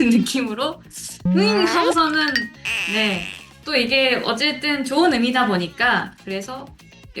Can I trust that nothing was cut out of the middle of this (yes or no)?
no